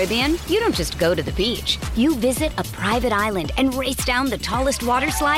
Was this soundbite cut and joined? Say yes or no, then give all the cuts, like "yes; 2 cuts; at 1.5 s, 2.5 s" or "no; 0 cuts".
no; 0 cuts